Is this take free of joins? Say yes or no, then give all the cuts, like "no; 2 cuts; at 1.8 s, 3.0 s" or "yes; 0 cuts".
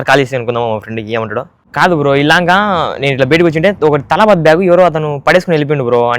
no; 1 cut; at 1.6 s